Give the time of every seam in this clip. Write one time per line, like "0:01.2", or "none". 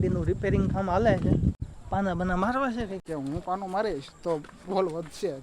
0:01.7
0:03.0